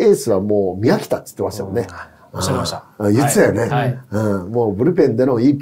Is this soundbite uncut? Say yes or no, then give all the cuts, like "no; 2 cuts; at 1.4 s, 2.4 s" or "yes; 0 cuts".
yes; 0 cuts